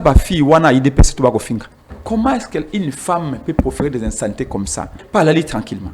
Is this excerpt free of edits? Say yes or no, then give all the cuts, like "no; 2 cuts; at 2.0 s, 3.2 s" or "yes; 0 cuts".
no; 2 cuts; at 1.9 s, 5.0 s